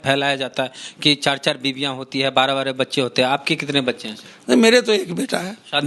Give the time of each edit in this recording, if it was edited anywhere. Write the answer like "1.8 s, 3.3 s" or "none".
none